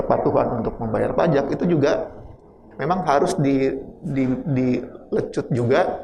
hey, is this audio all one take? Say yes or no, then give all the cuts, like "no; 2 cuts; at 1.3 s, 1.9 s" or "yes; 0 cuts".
yes; 0 cuts